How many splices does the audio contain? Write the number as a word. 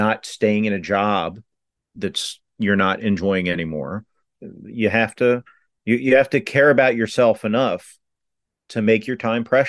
one